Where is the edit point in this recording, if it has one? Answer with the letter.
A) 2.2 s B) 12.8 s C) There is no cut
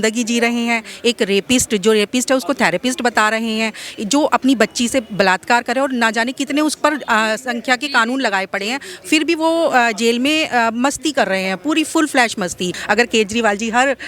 B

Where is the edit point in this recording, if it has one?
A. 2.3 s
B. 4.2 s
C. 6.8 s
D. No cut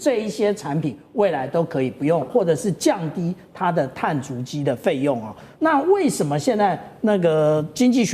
A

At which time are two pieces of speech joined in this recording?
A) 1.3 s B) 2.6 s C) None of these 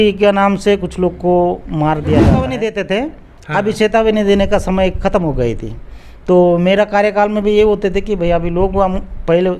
B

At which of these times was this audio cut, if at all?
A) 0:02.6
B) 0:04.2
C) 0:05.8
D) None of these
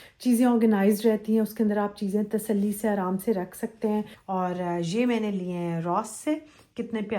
B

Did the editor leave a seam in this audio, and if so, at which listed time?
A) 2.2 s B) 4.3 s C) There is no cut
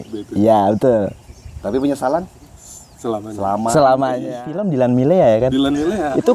B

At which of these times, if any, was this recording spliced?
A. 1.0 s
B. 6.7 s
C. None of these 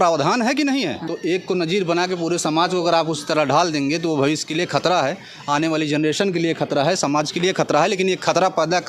A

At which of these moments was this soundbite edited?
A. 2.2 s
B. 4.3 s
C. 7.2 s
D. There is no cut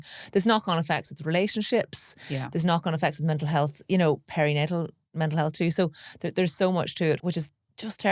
C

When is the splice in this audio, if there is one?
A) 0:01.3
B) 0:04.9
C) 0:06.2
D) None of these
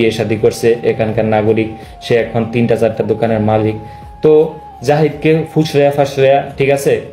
D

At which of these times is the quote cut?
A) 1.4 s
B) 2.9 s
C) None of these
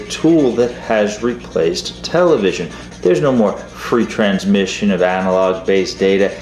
B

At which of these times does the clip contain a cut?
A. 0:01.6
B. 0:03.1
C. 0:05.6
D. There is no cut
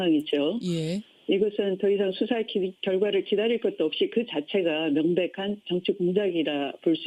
A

